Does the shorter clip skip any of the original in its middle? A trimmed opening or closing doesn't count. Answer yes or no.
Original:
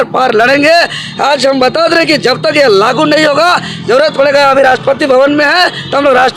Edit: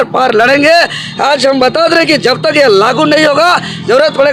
no